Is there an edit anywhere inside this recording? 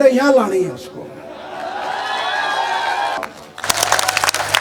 yes; 1 cut; at 3.2 s

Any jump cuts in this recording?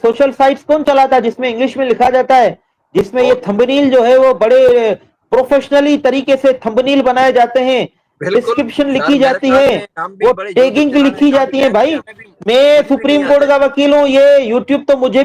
no; 0 cuts

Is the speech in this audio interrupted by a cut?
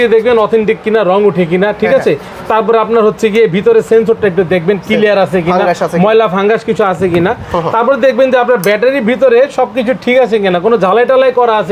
no; 0 cuts

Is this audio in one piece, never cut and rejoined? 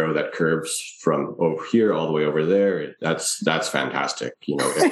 yes; 0 cuts

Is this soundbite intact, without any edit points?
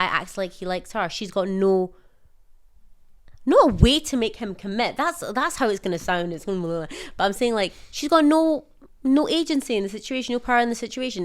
yes; 0 cuts

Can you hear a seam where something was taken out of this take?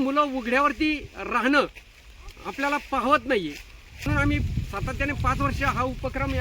yes; 1 cut; at 4.1 s

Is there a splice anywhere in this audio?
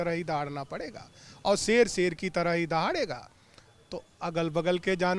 no; 0 cuts

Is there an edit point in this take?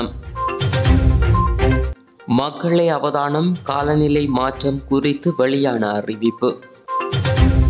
yes; 1 cut; at 6.7 s

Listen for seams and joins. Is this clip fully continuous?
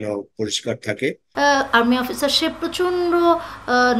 no; 1 cut; at 1.2 s

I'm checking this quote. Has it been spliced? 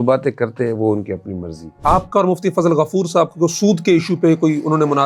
yes; 1 cut; at 1.8 s

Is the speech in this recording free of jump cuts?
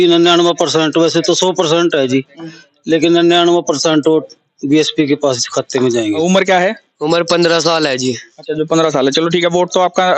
no; 1 cut; at 6.2 s

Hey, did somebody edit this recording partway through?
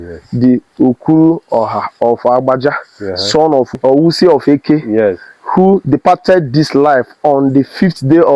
yes; 1 cut; at 3.7 s

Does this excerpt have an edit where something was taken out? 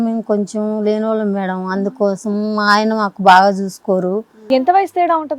yes; 1 cut; at 4.4 s

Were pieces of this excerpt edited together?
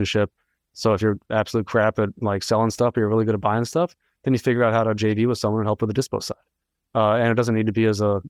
no; 0 cuts

